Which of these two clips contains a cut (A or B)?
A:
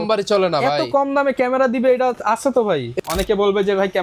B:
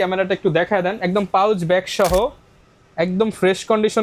A